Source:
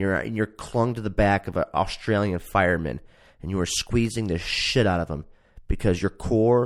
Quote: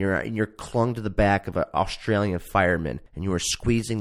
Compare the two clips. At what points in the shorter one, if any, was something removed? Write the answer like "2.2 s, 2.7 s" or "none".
3.1 s

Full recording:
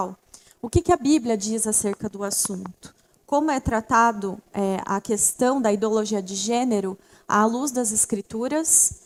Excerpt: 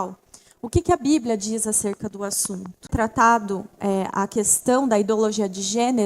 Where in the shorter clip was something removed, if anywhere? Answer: 2.9 s

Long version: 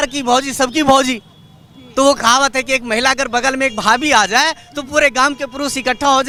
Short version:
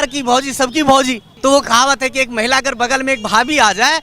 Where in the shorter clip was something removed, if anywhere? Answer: 1.2 s

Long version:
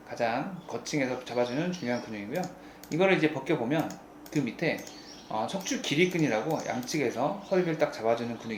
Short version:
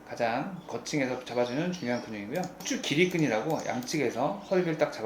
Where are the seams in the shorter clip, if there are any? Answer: 2.6 s

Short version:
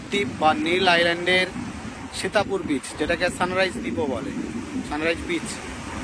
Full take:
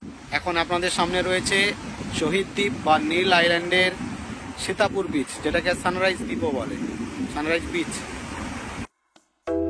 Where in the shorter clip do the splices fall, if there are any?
none

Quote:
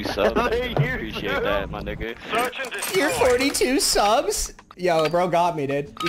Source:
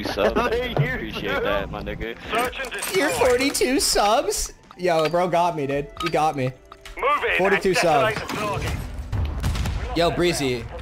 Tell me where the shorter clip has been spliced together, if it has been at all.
none

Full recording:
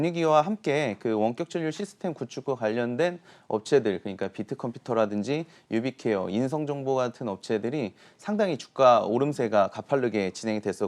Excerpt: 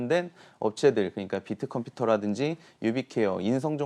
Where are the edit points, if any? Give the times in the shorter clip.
none

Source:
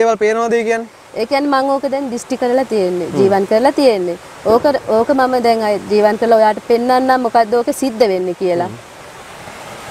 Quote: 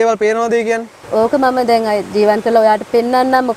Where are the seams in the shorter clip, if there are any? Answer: 1.1 s

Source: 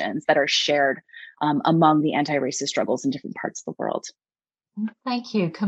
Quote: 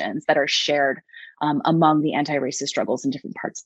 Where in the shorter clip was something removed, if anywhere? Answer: none

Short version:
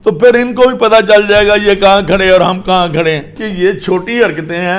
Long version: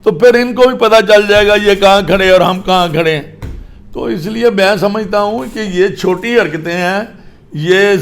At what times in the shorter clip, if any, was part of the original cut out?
3.4 s

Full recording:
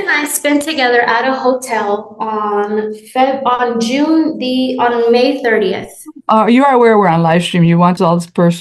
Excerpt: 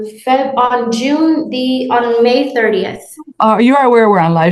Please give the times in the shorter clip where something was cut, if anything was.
none

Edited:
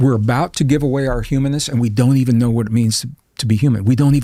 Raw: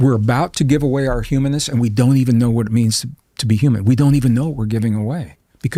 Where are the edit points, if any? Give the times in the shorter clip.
none

